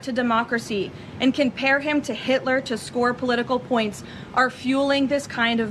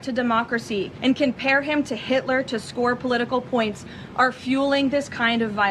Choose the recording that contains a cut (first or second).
second